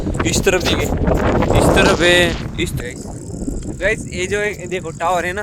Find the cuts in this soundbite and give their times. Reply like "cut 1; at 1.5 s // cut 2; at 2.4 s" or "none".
cut 1; at 2.7 s